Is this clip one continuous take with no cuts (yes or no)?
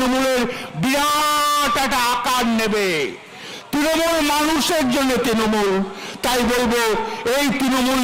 yes